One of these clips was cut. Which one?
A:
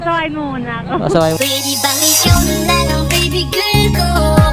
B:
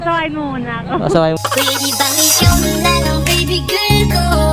A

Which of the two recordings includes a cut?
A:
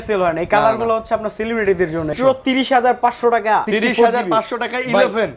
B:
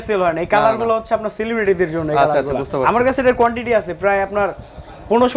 A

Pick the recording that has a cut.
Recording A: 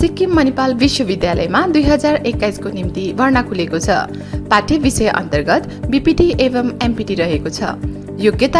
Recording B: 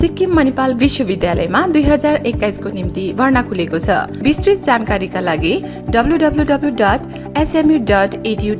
B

